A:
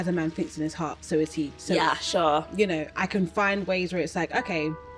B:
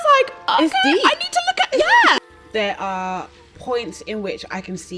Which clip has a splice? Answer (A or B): B